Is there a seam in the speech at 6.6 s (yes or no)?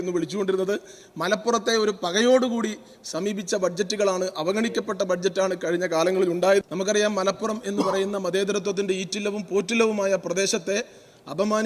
yes